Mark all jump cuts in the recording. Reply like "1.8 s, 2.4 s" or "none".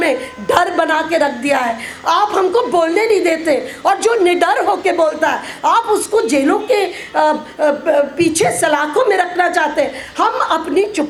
none

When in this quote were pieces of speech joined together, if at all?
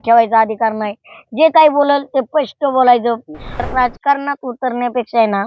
3.6 s

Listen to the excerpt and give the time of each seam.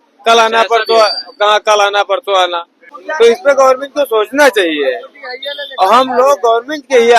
3.0 s

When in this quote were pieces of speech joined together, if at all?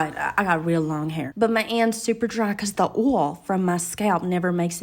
1.3 s

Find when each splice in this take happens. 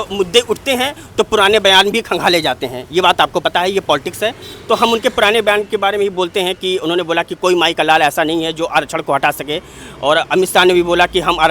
none

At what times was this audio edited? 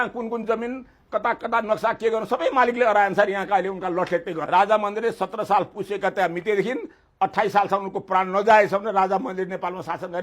4.4 s

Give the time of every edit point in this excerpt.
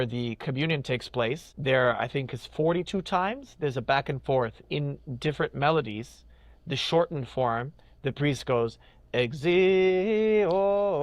1.5 s

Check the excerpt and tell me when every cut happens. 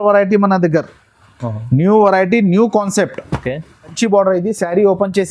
3.9 s

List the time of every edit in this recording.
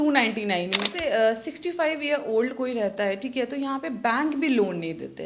0.9 s

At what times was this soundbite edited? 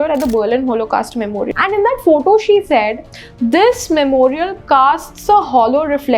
1.5 s

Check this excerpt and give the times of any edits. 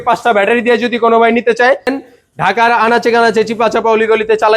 1.9 s

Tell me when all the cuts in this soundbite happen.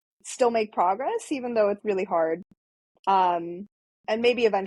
1.8 s

